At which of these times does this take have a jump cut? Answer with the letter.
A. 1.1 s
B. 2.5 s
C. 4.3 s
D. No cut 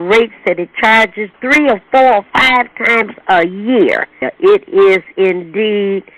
C